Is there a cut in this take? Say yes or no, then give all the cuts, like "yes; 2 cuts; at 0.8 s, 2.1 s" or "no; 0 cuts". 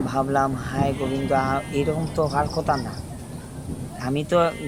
no; 0 cuts